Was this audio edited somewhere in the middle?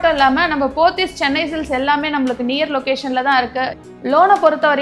yes; 1 cut; at 3.8 s

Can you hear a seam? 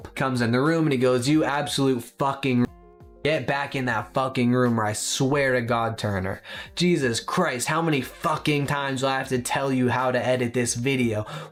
no; 0 cuts

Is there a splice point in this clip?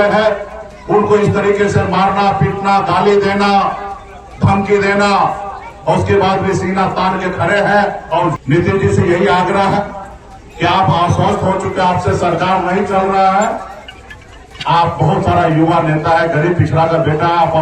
yes; 1 cut; at 8.3 s

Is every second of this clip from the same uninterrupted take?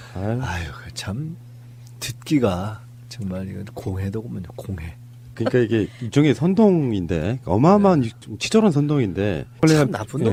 yes; 0 cuts

